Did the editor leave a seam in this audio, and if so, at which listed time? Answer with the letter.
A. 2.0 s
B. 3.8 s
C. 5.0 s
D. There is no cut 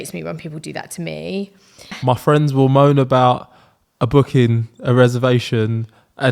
A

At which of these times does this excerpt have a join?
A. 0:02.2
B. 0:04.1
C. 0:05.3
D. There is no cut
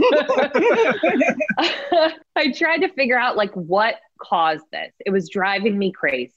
A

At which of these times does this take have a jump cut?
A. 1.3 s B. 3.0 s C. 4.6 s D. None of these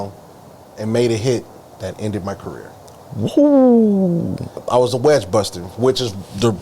C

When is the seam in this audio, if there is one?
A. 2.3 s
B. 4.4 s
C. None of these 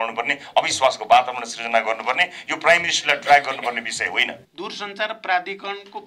B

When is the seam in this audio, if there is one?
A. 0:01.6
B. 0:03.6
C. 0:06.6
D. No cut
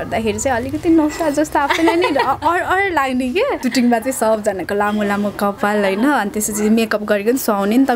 B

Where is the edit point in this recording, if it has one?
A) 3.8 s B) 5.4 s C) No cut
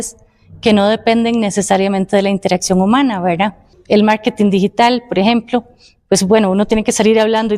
A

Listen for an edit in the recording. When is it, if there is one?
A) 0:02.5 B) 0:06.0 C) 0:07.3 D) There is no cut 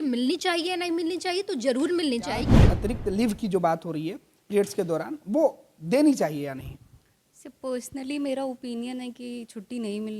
A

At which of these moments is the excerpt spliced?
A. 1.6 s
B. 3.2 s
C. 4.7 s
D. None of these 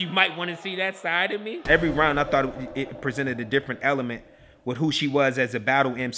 A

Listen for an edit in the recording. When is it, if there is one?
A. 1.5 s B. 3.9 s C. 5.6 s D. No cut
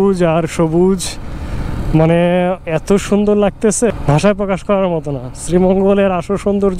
B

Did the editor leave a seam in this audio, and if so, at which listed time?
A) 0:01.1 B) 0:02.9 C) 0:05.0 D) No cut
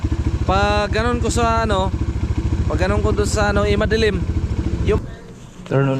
C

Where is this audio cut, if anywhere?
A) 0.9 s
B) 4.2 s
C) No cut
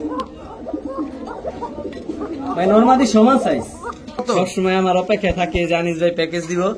B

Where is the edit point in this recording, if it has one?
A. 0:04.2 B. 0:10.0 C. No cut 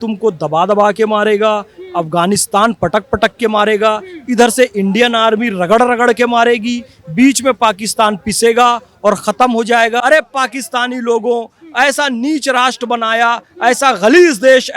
B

